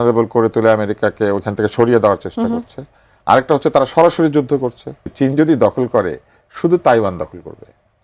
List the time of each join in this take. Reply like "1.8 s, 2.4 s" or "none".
5.1 s